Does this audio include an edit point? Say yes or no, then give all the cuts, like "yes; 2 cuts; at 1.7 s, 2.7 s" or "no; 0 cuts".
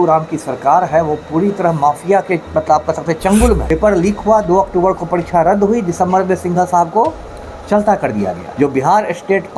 yes; 2 cuts; at 3.6 s, 8.5 s